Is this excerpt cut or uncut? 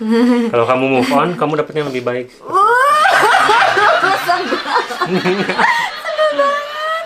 uncut